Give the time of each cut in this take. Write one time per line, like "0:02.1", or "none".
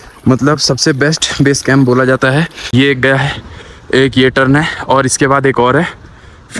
0:02.6